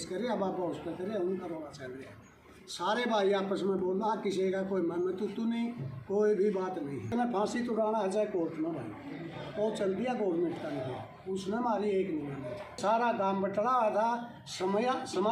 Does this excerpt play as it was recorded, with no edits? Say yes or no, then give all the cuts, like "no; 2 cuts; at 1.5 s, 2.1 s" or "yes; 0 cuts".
no; 2 cuts; at 7.1 s, 12.8 s